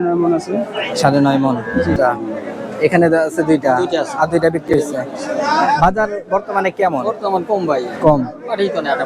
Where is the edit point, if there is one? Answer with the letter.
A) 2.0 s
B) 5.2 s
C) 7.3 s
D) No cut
A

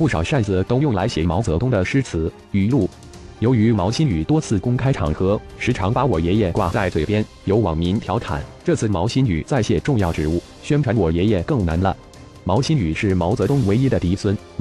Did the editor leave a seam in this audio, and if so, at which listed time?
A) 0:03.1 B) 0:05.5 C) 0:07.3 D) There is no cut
C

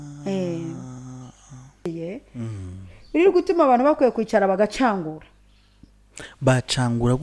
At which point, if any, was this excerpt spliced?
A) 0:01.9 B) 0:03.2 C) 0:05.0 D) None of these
A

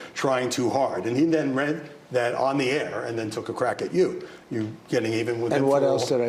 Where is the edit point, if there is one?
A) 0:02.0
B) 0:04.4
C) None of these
C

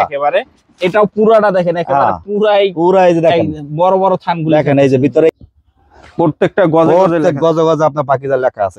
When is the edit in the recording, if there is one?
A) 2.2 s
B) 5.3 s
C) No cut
B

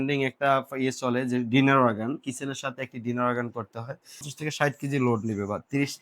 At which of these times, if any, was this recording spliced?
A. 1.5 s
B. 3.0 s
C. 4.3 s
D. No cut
C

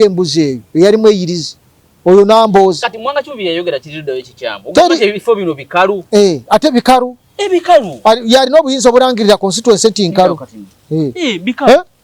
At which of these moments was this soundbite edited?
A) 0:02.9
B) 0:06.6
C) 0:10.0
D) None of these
D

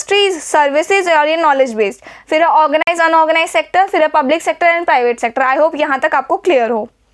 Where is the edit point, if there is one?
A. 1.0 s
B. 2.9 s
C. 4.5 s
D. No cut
D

